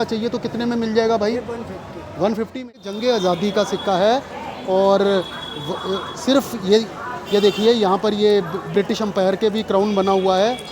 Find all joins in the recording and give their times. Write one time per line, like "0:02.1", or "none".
0:02.8